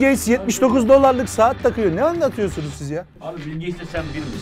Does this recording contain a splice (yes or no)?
yes